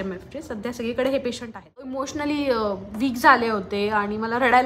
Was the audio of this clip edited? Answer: yes; 1 cut; at 2.1 s

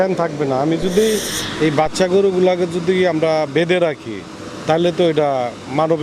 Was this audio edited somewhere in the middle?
yes; 1 cut; at 1.3 s

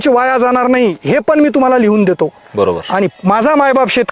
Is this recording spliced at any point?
no; 0 cuts

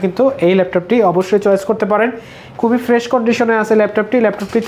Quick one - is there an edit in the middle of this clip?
no; 0 cuts

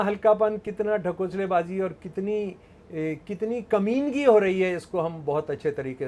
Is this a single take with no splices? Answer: yes; 0 cuts

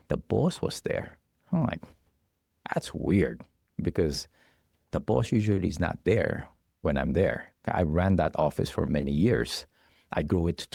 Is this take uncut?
yes; 0 cuts

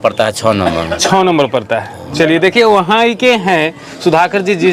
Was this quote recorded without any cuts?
yes; 0 cuts

